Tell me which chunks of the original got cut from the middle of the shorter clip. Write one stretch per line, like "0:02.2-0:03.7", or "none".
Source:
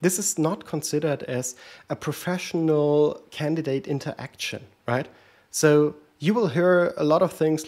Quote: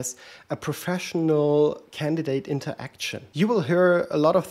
0:04.6-0:06.1